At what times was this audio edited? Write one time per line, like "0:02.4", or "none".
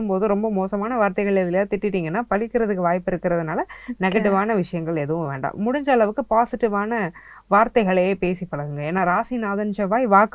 none

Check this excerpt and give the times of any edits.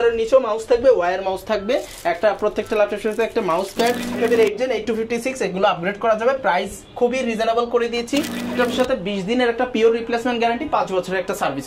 0:04.1
0:08.5

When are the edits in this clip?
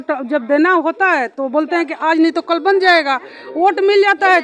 none

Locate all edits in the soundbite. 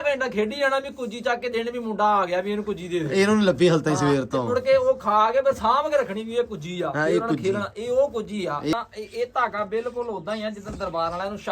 0:08.7

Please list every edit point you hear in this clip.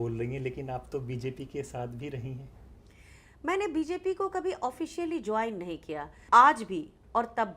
0:06.1

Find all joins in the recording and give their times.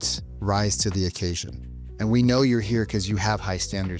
none

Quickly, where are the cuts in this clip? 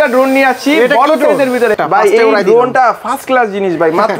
0:01.8

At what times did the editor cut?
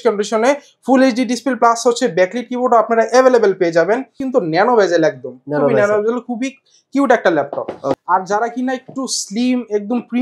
0:04.2
0:08.0

